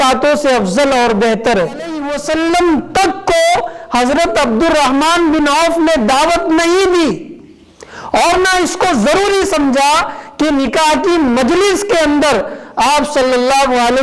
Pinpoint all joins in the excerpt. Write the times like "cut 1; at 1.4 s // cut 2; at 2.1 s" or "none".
cut 1; at 2.1 s